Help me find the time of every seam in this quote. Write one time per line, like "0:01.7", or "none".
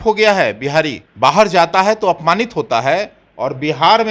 0:01.0